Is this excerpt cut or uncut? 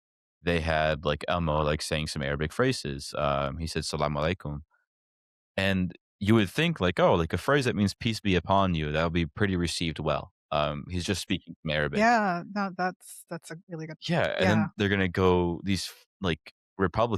uncut